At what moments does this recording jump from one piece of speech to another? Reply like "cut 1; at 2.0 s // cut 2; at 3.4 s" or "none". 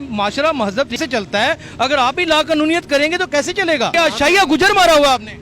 cut 1; at 0.9 s // cut 2; at 3.9 s